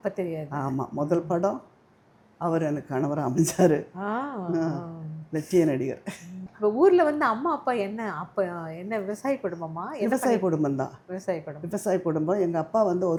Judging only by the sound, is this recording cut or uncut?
uncut